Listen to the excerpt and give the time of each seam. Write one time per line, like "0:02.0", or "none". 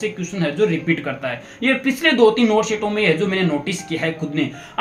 none